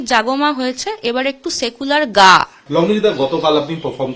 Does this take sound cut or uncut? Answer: cut